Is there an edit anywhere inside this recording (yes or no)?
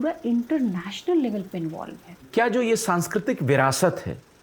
yes